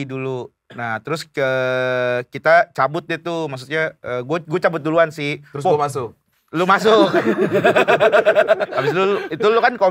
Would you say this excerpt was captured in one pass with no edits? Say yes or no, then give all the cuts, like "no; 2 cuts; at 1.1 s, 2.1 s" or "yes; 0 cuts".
no; 1 cut; at 8.7 s